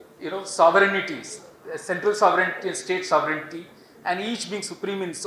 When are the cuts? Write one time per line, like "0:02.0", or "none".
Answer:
none